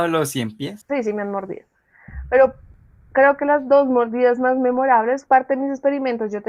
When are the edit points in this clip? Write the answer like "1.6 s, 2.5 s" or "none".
none

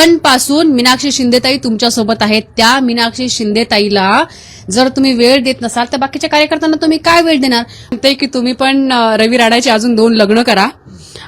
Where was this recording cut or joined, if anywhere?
7.9 s

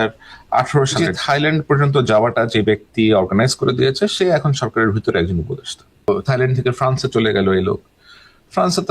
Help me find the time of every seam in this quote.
1.1 s, 6.1 s

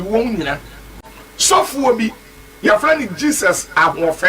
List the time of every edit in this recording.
1.0 s

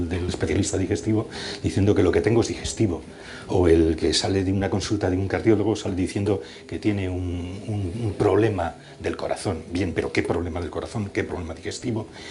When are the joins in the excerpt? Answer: 7.2 s

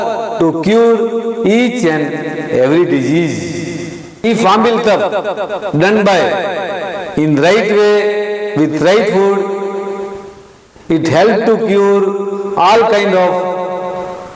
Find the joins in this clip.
none

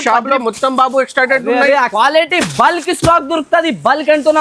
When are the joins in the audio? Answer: 1.9 s

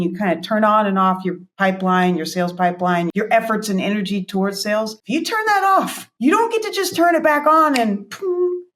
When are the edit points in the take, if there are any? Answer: none

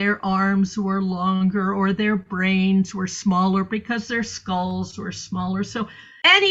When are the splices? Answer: none

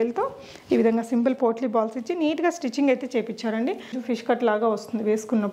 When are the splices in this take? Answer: 4.0 s

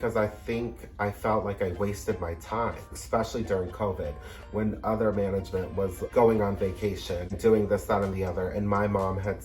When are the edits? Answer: 3.0 s, 6.0 s, 7.4 s

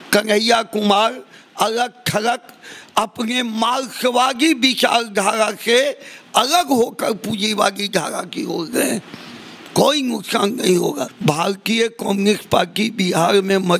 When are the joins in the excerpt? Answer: 11.1 s

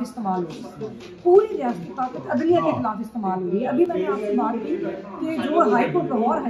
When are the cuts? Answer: none

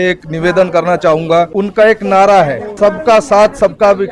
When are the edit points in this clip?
1.5 s, 2.7 s

